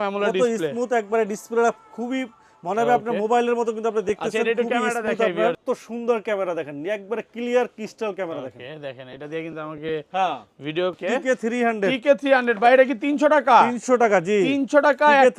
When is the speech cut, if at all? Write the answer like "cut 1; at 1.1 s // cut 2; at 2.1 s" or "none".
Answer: cut 1; at 5.6 s // cut 2; at 11.0 s